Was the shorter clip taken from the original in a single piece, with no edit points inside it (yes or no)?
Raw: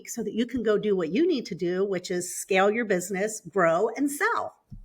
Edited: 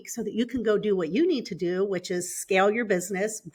yes